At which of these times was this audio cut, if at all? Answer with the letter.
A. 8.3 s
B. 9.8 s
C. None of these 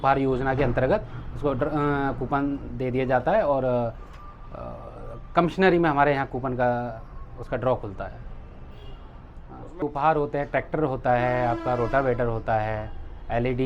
B